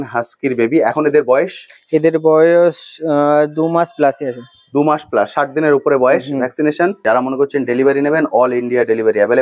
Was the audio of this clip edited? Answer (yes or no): yes